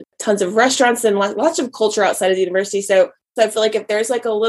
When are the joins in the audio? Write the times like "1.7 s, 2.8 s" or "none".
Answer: 3.3 s